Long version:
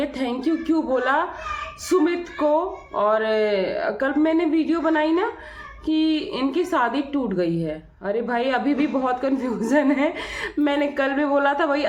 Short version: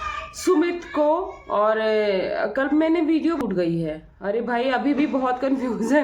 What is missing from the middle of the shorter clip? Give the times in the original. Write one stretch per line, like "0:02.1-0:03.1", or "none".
0:04.8-0:07.2